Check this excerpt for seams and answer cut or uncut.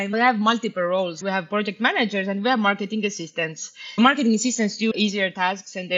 cut